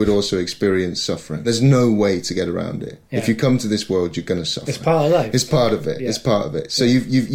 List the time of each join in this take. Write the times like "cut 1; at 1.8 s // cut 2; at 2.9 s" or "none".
cut 1; at 1.5 s